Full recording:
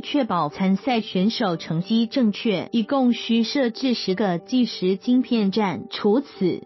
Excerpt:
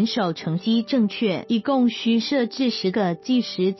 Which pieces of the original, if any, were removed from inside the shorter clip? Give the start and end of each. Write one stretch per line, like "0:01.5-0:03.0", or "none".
none